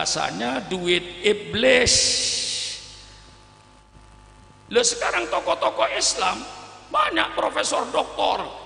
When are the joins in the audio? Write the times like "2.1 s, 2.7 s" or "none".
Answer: 3.8 s